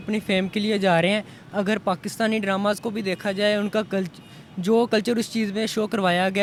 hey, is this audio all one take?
yes; 0 cuts

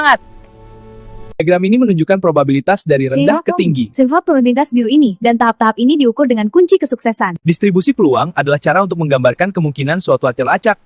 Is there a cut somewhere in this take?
yes; 1 cut; at 7.3 s

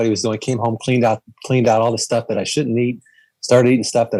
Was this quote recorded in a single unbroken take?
yes; 0 cuts

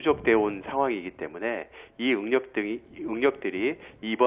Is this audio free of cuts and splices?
no; 1 cut; at 2.9 s

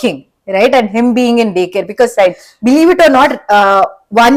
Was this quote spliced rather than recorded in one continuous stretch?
no; 0 cuts

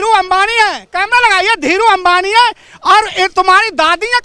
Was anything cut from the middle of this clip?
no; 0 cuts

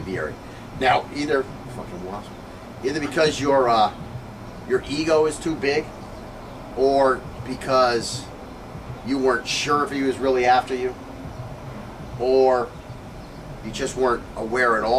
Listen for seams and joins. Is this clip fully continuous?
no; 1 cut; at 1.6 s

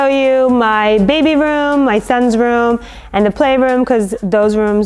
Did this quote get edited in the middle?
no; 0 cuts

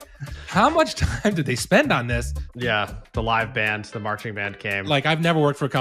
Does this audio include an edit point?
yes; 2 cuts; at 2.5 s, 4.8 s

